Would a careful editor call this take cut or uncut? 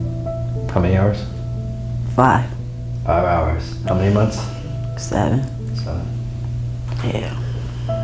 uncut